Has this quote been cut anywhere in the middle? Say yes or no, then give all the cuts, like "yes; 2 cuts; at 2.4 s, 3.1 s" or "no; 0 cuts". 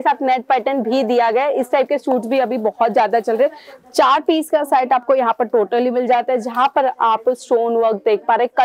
no; 0 cuts